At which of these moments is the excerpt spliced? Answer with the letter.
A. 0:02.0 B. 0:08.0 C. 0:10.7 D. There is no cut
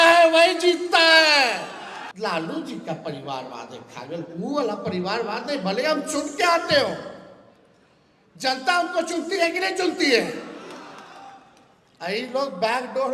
A